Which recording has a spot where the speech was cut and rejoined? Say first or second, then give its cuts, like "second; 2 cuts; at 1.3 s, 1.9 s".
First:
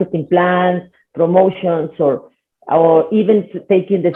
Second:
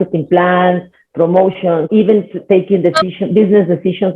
second; 1 cut; at 1.9 s